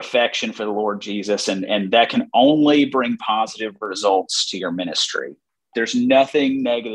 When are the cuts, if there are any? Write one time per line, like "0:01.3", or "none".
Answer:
0:05.5